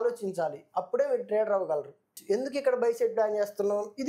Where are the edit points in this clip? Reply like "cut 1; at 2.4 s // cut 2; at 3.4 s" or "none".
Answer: cut 1; at 2.1 s